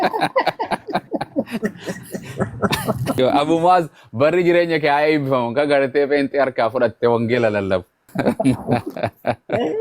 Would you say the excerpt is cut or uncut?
cut